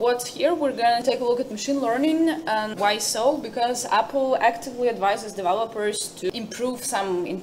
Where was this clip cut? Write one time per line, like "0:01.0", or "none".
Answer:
0:01.0
0:02.7
0:06.3